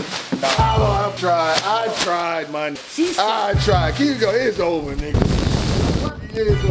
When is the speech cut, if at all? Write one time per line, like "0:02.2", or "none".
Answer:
0:01.2
0:02.8